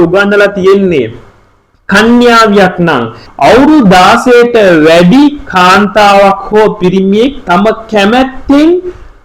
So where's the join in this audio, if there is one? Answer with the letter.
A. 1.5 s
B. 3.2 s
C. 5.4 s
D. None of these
B